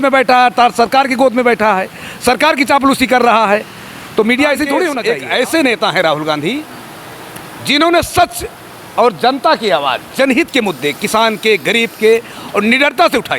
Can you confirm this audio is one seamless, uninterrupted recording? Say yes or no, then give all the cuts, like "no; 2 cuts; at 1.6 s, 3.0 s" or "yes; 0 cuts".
no; 1 cut; at 5.0 s